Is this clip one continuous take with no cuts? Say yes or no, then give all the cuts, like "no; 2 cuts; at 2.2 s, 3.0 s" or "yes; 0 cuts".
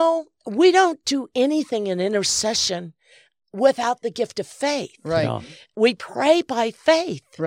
no; 1 cut; at 5.7 s